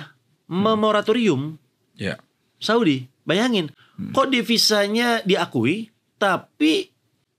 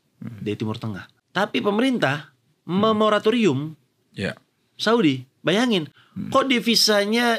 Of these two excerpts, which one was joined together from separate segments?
second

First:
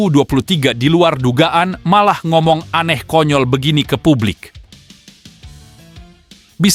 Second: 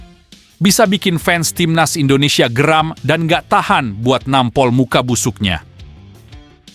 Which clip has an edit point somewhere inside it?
second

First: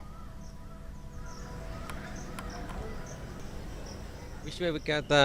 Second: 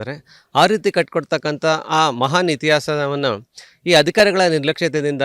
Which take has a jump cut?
first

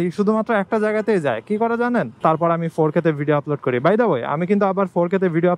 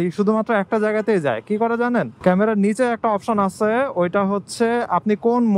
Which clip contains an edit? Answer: first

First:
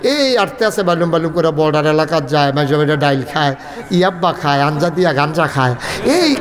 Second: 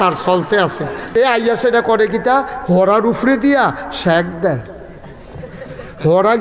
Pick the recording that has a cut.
second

